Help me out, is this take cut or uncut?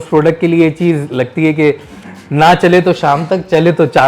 uncut